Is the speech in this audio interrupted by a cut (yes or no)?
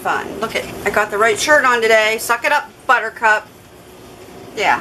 no